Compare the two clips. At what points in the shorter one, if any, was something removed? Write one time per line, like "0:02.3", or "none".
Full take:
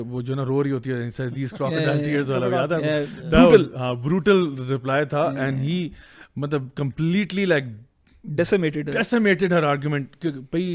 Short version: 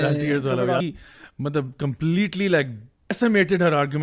0:00.8
0:03.1